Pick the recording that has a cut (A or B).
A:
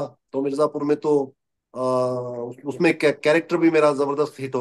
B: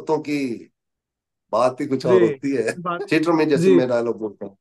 B